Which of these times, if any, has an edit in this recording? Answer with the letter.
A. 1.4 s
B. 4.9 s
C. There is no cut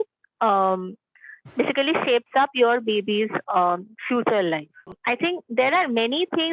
B